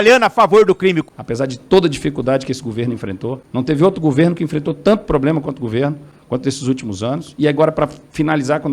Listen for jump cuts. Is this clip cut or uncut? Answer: cut